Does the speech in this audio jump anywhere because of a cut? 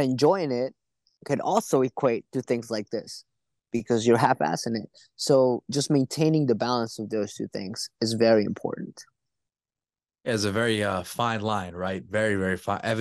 no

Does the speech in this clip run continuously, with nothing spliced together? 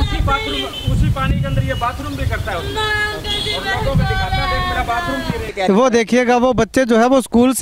no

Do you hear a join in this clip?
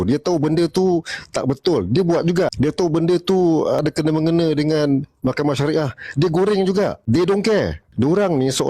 yes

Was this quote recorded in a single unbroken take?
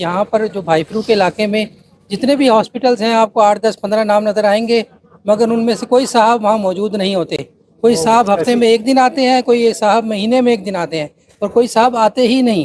yes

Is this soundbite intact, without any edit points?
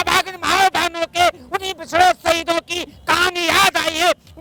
yes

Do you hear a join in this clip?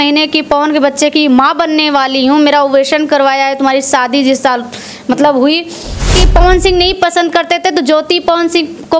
yes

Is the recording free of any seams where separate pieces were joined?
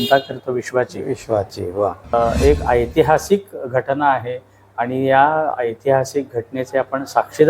no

